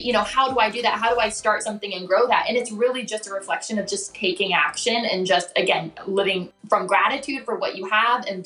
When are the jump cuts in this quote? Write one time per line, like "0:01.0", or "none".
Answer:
0:06.5